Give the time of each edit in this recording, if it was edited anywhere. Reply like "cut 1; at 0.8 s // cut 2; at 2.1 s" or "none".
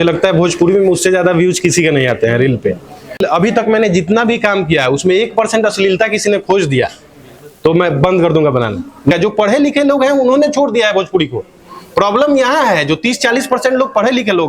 cut 1; at 3.2 s // cut 2; at 9.1 s